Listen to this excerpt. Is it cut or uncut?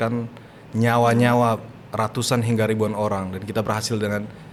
uncut